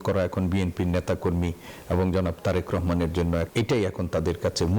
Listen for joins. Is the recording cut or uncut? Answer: cut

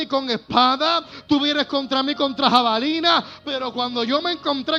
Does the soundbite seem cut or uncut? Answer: uncut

